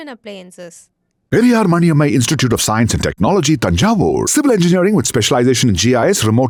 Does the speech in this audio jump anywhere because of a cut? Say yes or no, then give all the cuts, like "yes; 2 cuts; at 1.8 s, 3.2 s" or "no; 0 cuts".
no; 0 cuts